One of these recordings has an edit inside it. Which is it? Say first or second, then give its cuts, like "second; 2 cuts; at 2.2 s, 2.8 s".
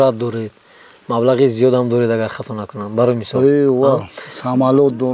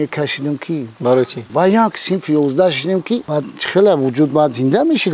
second; 2 cuts; at 1.4 s, 3.2 s